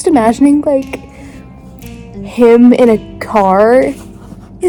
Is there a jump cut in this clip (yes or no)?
no